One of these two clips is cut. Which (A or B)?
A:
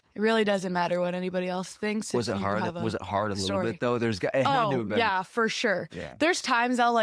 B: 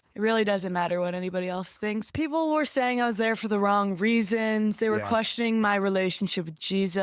B